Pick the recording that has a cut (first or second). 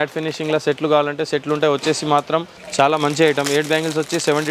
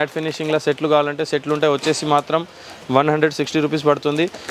first